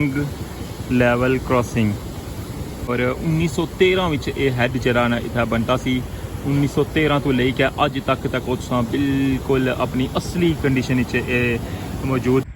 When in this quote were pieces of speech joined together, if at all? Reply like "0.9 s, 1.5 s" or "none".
2.9 s